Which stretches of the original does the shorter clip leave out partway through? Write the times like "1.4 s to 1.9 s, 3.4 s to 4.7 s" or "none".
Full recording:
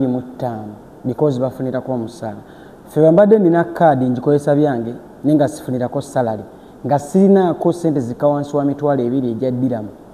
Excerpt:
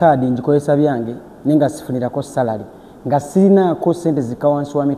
none